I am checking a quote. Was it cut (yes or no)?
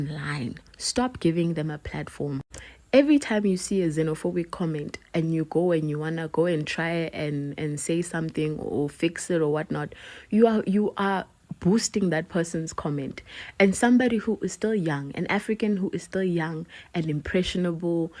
yes